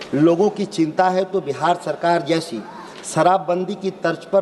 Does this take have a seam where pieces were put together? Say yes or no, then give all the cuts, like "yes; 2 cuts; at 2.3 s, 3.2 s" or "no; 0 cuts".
no; 0 cuts